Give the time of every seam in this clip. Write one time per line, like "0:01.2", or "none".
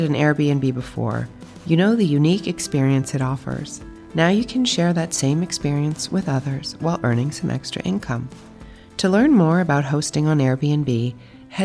none